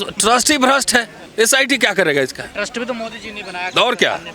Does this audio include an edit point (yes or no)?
no